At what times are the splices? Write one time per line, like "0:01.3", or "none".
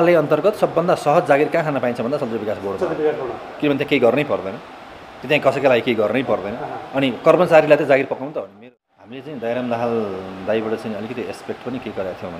0:08.5

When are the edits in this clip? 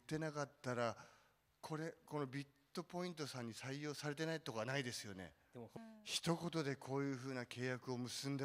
0:05.7

